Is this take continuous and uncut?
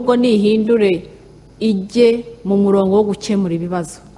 yes; 0 cuts

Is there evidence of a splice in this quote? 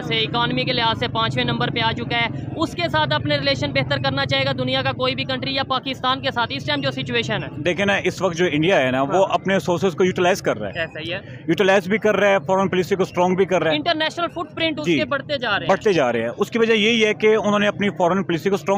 no; 0 cuts

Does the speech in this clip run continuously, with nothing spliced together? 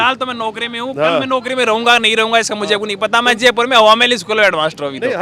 yes; 0 cuts

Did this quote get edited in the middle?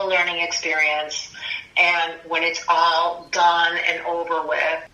no; 0 cuts

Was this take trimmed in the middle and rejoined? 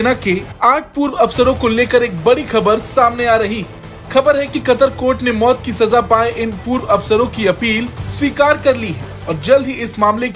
no; 0 cuts

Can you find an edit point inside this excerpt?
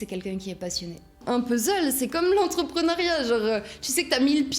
yes; 1 cut; at 1.2 s

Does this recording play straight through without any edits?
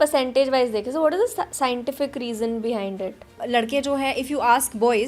no; 1 cut; at 3.3 s

